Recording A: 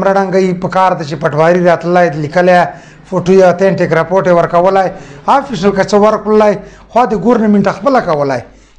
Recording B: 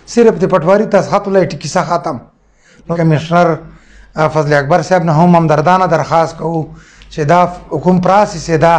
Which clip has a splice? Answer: B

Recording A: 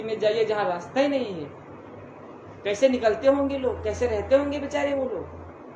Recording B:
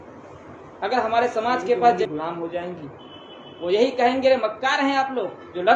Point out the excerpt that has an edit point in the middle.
B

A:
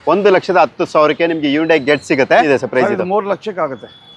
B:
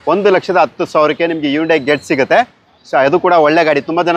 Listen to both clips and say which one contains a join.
A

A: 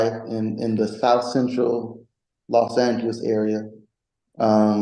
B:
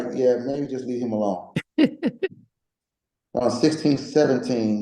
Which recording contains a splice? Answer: B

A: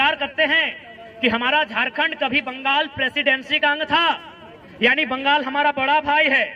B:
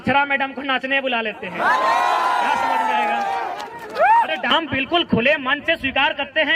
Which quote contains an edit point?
B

